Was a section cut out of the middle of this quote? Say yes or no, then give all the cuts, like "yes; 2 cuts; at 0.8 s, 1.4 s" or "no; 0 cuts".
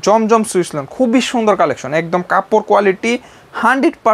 no; 0 cuts